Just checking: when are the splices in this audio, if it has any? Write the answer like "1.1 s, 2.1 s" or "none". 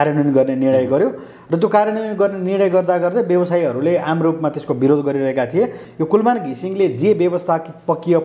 5.8 s